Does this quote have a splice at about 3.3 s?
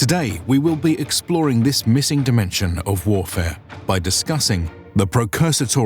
no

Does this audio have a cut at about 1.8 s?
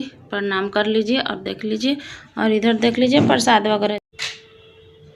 no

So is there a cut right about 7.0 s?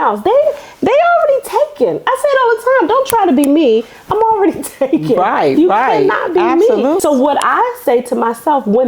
yes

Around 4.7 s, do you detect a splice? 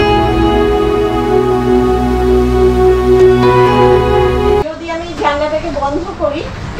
yes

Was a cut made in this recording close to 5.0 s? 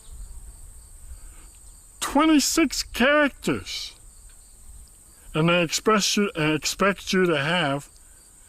yes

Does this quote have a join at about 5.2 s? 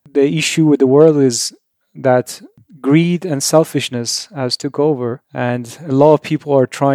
yes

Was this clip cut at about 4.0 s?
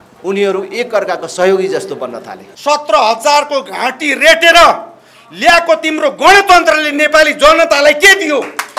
no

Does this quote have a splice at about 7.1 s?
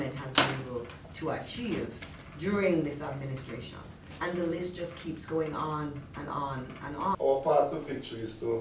yes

